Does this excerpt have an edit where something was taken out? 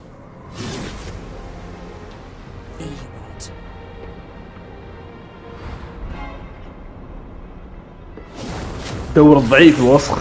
yes; 1 cut; at 2.8 s

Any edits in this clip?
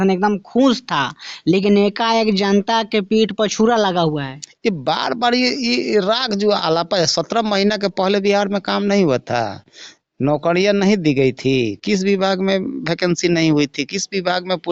no; 0 cuts

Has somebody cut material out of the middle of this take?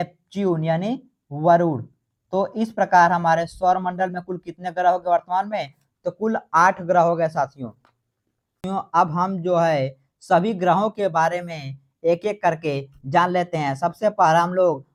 no; 0 cuts

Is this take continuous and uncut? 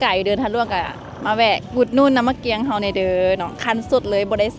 yes; 0 cuts

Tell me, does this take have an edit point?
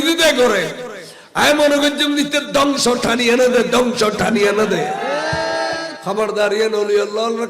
yes; 1 cut; at 5.9 s

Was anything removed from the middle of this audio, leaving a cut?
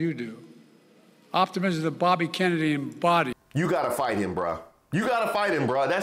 yes; 1 cut; at 3.4 s

